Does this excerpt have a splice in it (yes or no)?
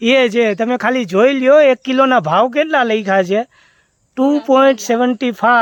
no